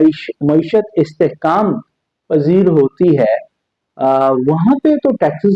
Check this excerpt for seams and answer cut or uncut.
uncut